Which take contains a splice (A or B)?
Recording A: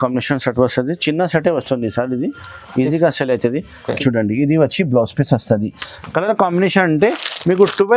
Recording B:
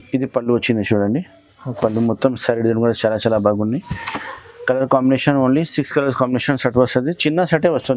A